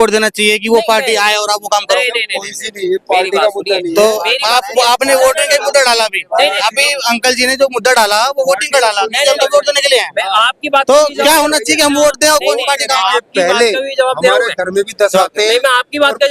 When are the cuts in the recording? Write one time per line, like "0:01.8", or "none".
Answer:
none